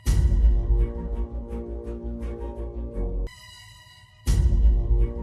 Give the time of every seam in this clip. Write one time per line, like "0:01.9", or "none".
0:03.3

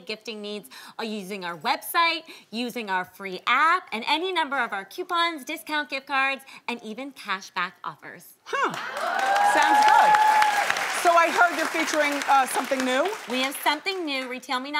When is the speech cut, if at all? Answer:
0:02.1

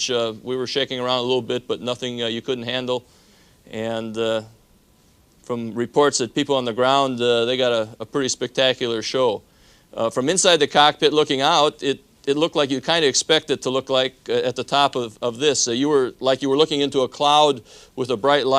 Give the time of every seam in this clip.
0:17.4

